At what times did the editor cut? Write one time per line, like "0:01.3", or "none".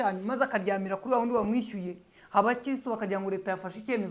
none